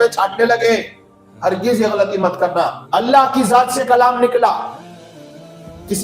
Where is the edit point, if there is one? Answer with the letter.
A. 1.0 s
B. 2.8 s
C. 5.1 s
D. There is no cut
B